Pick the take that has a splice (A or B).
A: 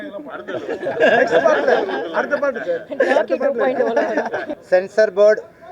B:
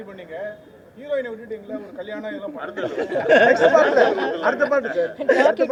A